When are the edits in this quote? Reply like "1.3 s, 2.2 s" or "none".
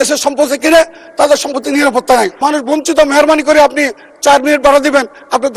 2.3 s